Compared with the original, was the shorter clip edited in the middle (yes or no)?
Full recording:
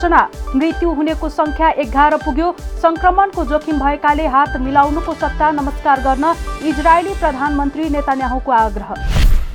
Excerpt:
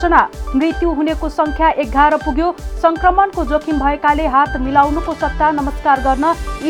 no